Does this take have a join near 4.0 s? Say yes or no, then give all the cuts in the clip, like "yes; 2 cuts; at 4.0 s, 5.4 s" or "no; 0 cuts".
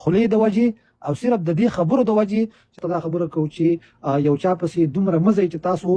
no; 1 cut; at 2.8 s